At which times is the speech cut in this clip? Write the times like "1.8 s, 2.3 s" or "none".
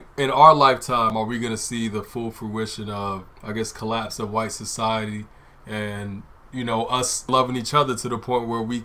none